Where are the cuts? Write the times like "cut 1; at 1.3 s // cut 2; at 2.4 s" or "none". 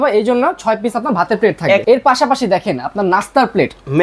cut 1; at 1.8 s